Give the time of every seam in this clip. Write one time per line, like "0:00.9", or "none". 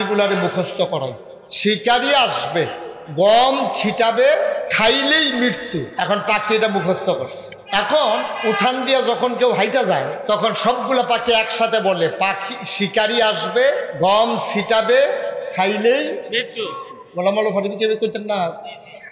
0:01.5